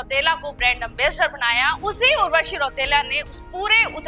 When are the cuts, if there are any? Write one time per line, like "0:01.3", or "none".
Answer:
none

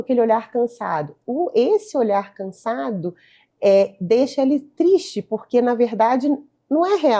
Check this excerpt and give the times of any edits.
none

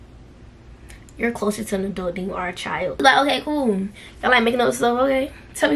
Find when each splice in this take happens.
0:03.0

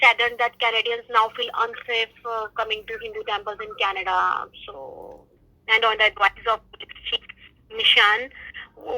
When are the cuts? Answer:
0:05.2

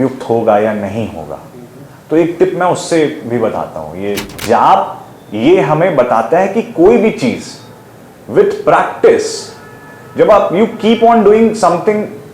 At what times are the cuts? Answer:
0:04.3

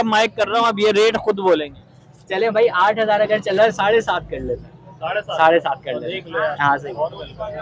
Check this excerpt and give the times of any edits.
none

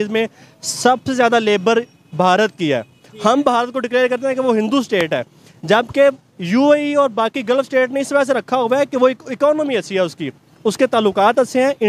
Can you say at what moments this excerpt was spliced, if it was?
none

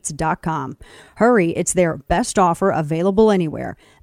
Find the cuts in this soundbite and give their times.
none

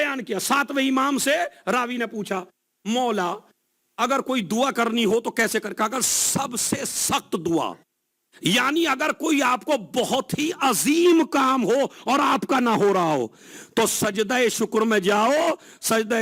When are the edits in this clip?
none

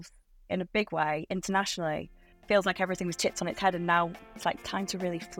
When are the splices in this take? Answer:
0:02.3
0:04.4

